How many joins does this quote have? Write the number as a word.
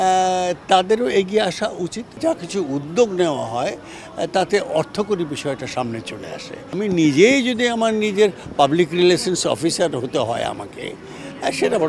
two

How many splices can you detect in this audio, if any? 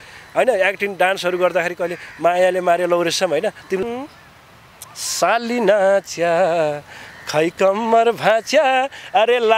one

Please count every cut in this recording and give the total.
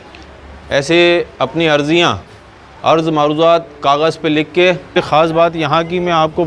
one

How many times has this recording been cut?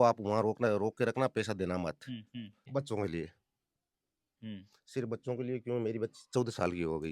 one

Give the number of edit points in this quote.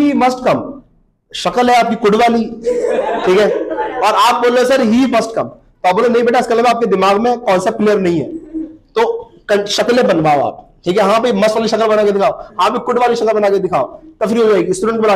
zero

